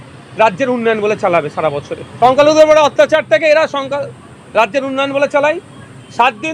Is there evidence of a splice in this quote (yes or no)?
yes